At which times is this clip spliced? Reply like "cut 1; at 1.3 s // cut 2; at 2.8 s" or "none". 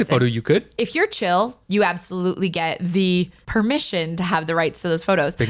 cut 1; at 3.4 s